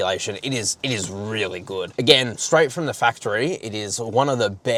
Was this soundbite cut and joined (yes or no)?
no